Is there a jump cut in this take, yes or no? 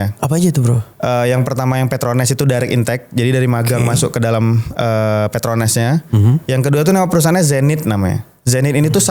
no